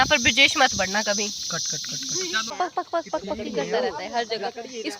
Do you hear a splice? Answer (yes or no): yes